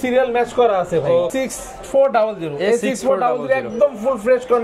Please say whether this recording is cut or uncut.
cut